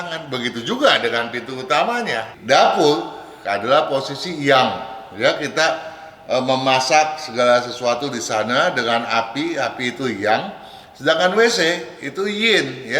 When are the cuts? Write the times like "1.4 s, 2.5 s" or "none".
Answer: 2.3 s